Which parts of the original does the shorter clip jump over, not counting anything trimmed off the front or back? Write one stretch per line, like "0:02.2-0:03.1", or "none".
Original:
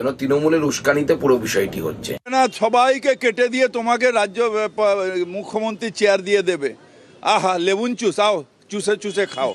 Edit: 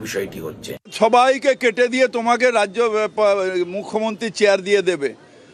0:02.3-0:02.5